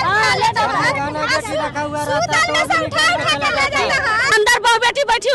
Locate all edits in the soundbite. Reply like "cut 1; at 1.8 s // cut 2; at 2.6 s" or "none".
cut 1; at 4.3 s